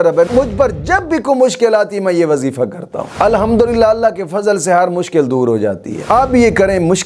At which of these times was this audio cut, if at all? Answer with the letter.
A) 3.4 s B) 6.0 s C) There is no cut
B